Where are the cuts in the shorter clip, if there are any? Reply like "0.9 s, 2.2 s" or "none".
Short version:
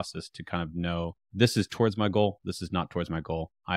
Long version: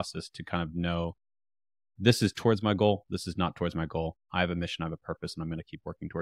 1.2 s